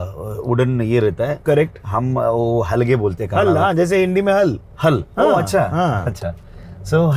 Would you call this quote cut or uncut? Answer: uncut